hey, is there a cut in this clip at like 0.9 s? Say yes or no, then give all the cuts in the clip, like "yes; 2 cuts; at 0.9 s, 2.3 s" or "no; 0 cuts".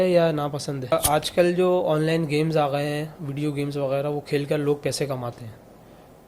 yes; 1 cut; at 0.9 s